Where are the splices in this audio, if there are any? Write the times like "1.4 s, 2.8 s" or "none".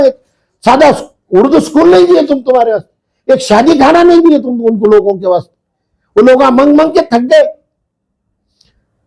none

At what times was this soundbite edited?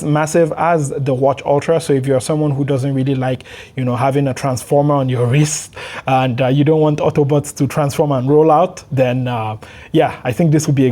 none

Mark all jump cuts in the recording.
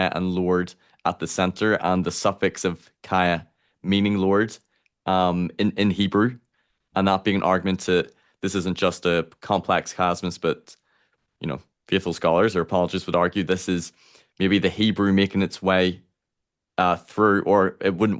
none

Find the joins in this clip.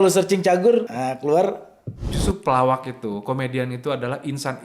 0.9 s, 2.0 s

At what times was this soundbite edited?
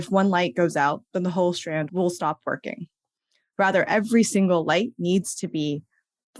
none

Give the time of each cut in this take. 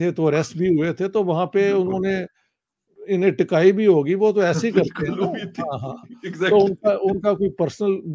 none

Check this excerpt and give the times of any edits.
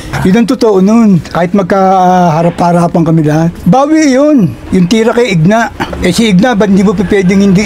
none

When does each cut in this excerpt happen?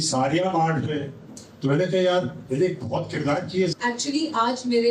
3.7 s

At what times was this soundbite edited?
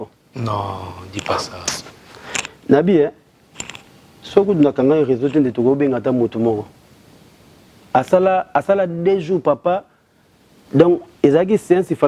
none

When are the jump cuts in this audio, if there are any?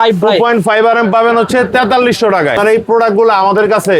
2.8 s

